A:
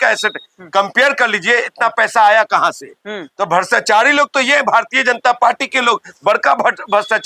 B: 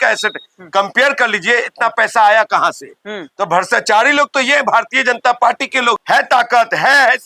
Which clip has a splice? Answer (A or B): B